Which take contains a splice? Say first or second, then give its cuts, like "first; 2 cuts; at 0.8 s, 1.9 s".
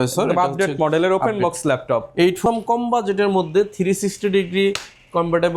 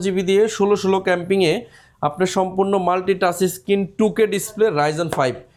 first; 1 cut; at 2.5 s